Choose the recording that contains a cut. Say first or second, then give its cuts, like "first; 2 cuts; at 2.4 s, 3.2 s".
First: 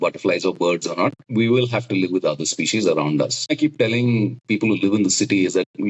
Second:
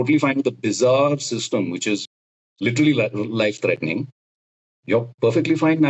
first; 2 cuts; at 1.2 s, 3.5 s